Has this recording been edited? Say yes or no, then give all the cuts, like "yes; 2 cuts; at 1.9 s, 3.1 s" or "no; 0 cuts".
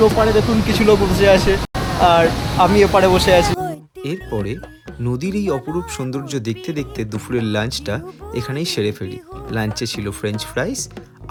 no; 0 cuts